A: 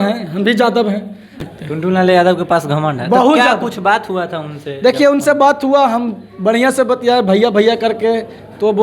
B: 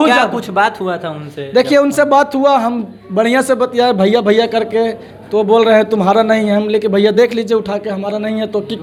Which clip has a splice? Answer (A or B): A